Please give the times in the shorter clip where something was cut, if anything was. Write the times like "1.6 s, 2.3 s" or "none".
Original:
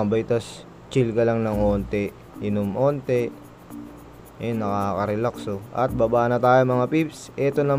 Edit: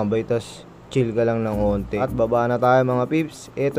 2.0 s